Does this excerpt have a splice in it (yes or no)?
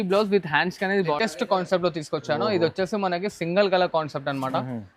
yes